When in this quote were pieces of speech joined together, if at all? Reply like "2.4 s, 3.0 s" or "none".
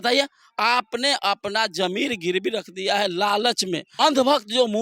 3.9 s